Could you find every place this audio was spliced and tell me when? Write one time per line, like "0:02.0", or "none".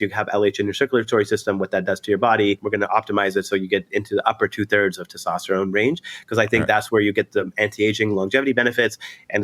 0:02.6